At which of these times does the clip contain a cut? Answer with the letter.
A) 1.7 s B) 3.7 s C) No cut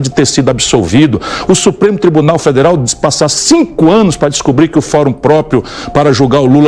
C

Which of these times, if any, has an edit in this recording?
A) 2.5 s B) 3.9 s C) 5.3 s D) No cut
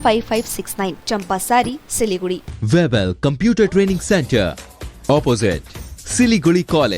A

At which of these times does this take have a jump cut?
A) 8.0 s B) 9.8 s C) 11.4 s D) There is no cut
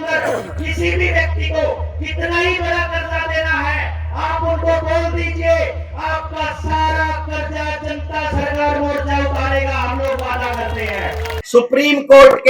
C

